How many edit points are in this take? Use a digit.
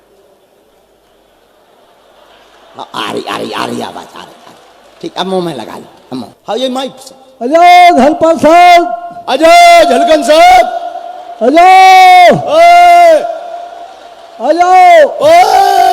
1